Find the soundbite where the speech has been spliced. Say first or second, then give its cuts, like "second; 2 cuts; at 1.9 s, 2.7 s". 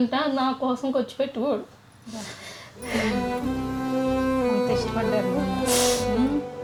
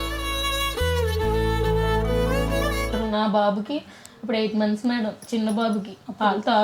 second; 1 cut; at 3.0 s